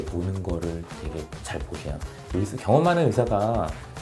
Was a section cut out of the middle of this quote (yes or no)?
yes